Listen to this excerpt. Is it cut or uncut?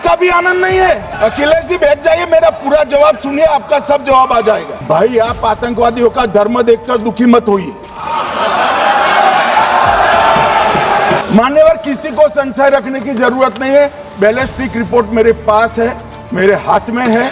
cut